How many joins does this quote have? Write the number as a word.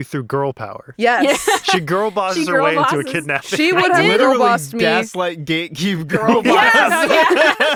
zero